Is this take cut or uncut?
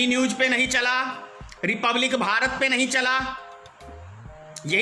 uncut